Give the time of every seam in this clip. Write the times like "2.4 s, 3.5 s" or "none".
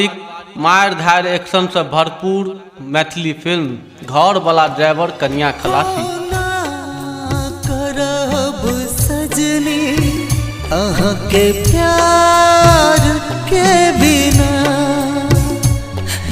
6.0 s

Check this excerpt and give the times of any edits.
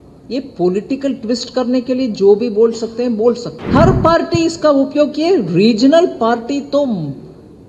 3.5 s

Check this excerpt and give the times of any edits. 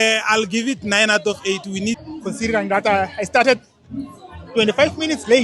2.0 s

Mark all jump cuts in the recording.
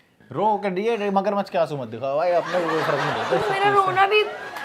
none

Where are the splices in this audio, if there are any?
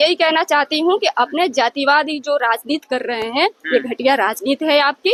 none

